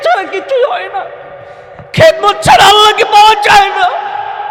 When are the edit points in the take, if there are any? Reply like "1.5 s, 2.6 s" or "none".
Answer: none